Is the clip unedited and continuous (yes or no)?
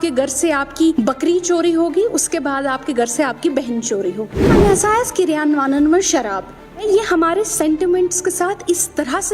no